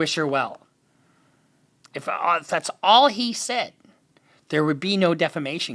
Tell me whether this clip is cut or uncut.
uncut